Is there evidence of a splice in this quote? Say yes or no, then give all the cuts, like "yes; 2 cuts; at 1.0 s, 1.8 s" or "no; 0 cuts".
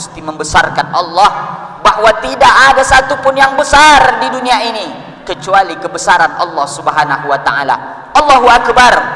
no; 0 cuts